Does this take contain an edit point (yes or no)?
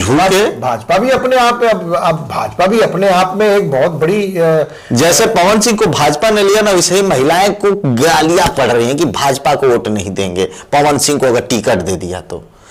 no